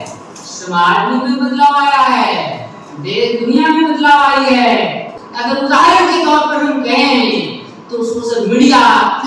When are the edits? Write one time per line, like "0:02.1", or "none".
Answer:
0:05.1

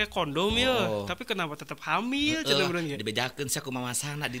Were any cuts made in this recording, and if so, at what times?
none

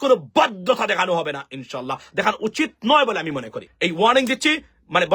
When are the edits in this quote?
0:03.6

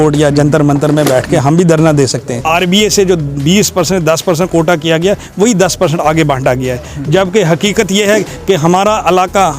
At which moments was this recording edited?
0:02.4

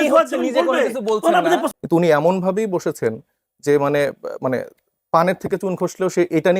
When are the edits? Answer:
0:01.7

